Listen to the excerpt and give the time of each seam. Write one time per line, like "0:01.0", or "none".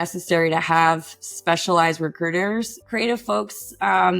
0:02.8

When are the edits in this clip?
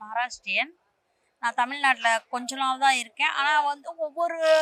none

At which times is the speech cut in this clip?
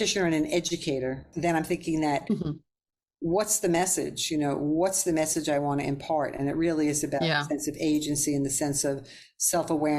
0:01.3

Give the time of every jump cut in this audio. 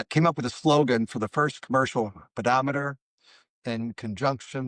none

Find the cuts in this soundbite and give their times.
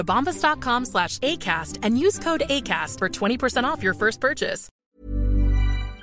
0:04.7

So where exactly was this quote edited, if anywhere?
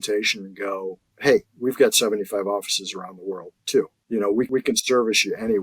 0:01.1
0:04.5

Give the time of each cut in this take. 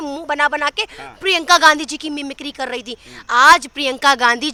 none

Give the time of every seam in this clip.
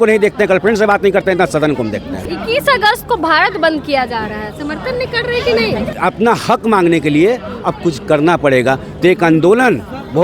0:02.3
0:05.9

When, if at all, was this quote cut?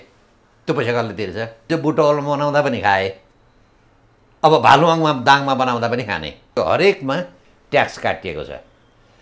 0:01.7
0:06.4

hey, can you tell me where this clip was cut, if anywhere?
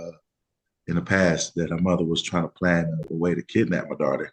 none

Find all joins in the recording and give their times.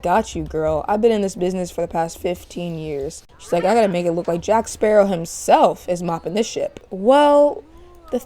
0:03.2
0:06.8

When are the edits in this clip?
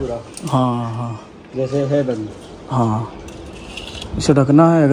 none

